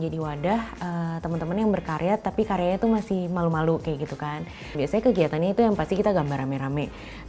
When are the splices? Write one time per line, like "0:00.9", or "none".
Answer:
0:04.6